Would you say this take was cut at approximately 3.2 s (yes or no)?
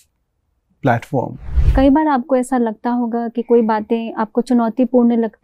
no